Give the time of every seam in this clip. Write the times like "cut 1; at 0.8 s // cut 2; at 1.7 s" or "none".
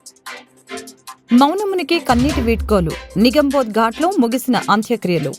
none